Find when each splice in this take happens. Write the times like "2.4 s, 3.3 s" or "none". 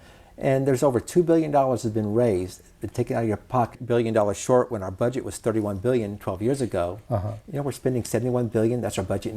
3.8 s